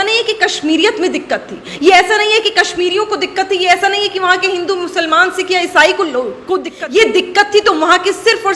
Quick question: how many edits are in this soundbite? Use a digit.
1